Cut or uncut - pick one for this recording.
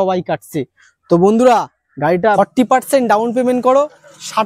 cut